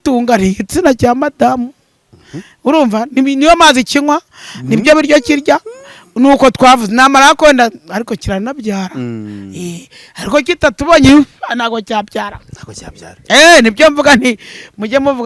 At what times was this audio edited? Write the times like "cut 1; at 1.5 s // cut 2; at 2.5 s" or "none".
none